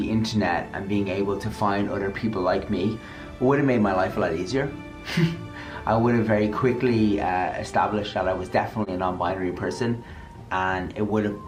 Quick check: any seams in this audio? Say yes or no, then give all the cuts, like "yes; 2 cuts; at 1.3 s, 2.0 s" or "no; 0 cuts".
no; 0 cuts